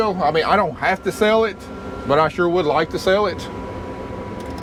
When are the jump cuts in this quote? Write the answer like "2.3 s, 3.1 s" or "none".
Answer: none